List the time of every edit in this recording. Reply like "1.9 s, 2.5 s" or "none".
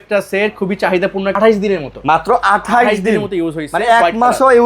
1.4 s